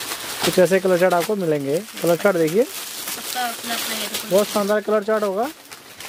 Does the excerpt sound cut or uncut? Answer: uncut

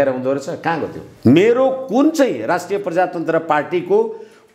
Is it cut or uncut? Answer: cut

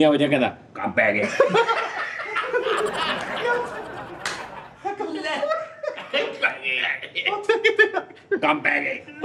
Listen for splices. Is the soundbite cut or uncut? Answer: uncut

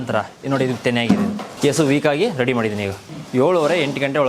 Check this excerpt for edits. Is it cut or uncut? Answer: cut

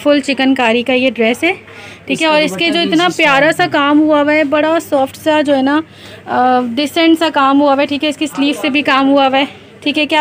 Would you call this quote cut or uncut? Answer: uncut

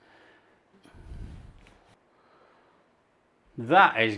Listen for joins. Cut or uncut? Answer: cut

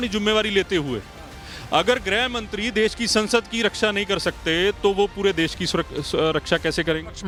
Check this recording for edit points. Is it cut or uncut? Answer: uncut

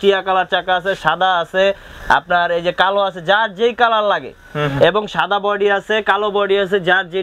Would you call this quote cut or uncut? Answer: uncut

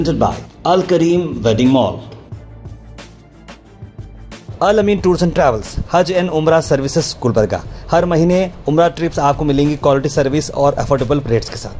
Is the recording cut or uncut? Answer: cut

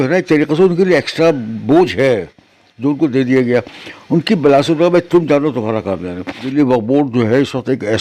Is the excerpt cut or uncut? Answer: cut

